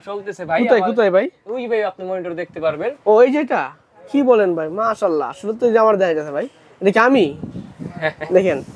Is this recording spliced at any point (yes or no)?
no